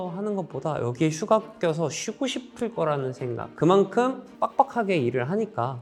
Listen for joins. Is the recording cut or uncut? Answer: uncut